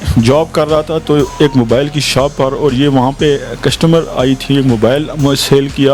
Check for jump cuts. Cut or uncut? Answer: uncut